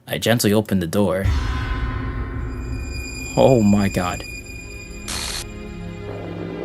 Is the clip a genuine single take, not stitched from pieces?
yes; 0 cuts

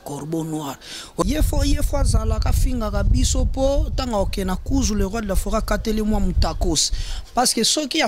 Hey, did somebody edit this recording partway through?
yes; 1 cut; at 1.2 s

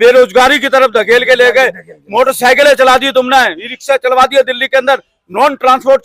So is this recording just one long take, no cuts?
yes; 0 cuts

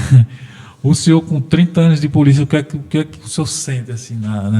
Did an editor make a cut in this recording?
no; 0 cuts

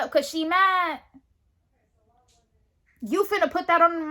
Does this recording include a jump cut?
no; 0 cuts

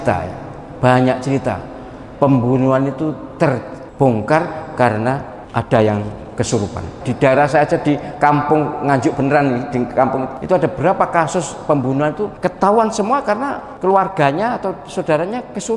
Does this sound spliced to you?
yes; 6 cuts; at 3.8 s, 5.4 s, 7.0 s, 10.3 s, 12.3 s, 13.7 s

